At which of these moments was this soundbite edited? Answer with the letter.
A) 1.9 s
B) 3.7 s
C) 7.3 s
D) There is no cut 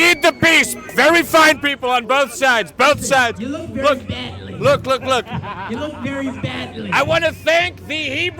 C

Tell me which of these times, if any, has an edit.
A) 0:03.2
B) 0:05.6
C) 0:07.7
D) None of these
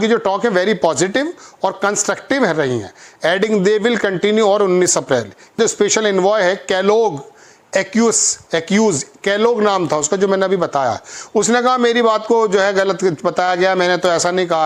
B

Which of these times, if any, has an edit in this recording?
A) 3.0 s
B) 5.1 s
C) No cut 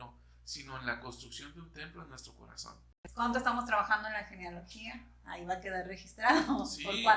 A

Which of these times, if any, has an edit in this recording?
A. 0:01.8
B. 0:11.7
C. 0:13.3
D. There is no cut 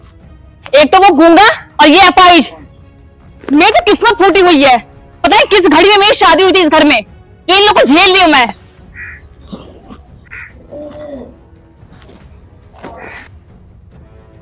C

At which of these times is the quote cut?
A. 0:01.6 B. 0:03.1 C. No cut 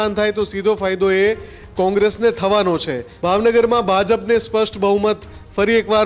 B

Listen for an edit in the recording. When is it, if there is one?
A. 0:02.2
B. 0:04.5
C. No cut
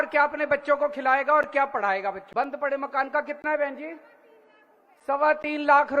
A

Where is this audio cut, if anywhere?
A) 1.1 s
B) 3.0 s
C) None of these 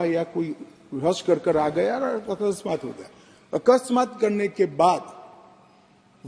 C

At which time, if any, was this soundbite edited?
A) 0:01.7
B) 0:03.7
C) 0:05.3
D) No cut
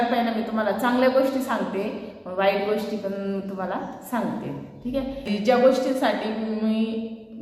C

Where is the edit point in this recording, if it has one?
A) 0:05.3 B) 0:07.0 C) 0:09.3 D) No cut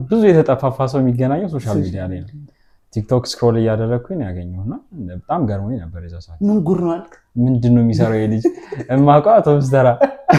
D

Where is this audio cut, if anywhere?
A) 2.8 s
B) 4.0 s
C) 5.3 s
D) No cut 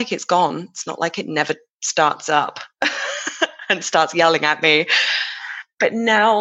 D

